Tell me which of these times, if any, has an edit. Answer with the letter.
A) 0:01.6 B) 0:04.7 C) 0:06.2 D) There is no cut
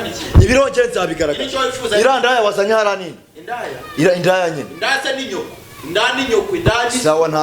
D